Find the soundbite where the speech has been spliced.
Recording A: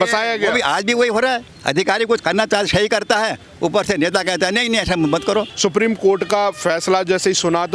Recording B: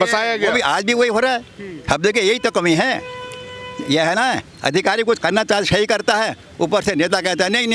A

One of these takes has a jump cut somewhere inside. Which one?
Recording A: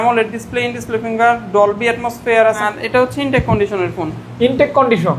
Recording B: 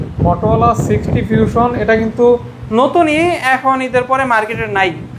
A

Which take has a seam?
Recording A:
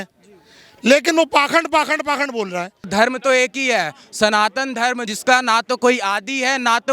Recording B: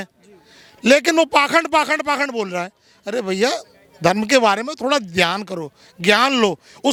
A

